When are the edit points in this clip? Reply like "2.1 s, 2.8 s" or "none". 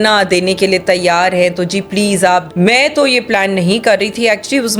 2.5 s